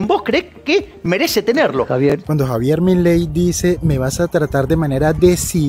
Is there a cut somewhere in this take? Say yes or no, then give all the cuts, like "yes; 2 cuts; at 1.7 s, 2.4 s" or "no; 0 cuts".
no; 0 cuts